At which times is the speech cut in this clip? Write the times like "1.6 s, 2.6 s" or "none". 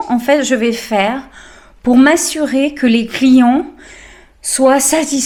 none